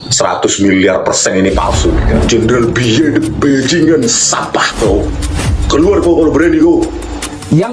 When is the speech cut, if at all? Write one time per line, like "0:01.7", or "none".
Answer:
0:02.1